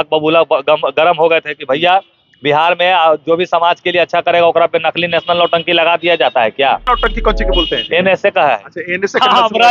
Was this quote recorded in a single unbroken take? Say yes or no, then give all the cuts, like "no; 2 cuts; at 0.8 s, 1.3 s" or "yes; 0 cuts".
no; 1 cut; at 6.8 s